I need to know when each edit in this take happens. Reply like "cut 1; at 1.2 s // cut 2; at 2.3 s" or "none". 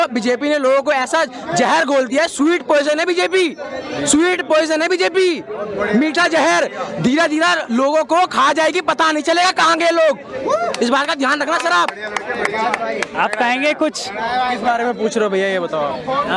none